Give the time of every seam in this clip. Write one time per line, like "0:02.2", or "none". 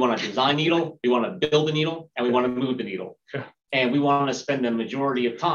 none